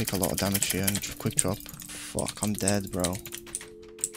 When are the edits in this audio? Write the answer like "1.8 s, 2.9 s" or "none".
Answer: 1.9 s